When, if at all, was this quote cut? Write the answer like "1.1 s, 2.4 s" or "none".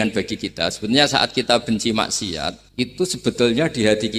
2.6 s